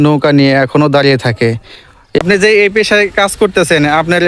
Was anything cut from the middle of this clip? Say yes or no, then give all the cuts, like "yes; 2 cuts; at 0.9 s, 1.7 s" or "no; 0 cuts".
yes; 1 cut; at 2.2 s